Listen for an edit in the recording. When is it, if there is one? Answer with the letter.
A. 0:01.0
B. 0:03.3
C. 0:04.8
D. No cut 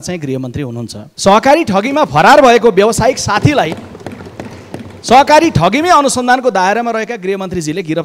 A